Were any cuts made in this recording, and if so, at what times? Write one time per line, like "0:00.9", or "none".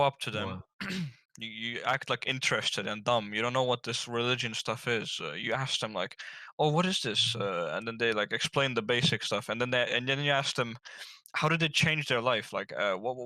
none